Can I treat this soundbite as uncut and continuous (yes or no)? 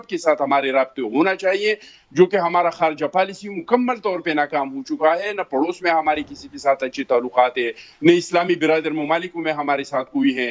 yes